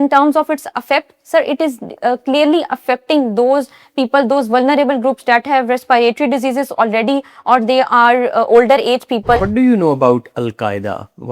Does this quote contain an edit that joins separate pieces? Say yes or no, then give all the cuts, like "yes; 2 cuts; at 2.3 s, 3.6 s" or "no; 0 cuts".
yes; 1 cut; at 9.4 s